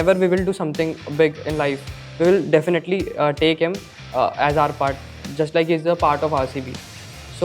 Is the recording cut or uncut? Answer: uncut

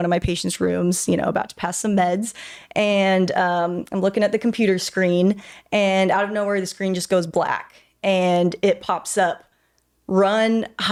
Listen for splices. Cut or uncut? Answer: uncut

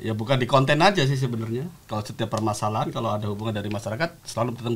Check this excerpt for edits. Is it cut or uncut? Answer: uncut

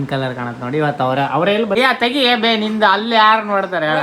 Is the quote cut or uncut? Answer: cut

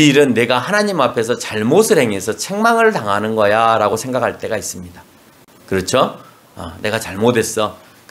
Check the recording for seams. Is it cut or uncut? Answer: uncut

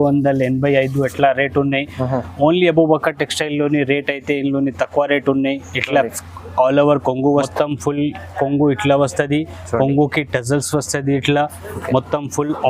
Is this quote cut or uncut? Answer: cut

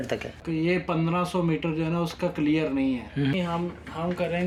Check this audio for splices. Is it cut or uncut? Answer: uncut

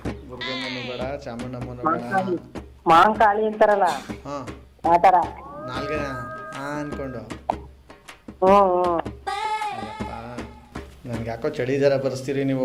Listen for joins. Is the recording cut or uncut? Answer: uncut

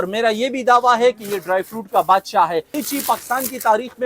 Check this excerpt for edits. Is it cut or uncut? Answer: cut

